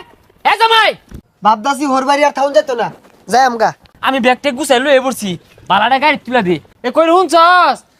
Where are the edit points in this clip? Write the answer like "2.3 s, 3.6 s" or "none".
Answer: 1.1 s, 3.9 s, 6.7 s